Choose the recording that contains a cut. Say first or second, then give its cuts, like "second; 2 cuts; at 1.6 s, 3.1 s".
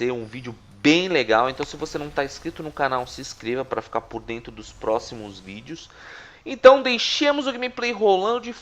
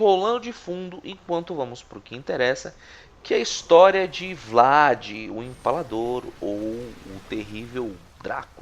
second; 1 cut; at 2.0 s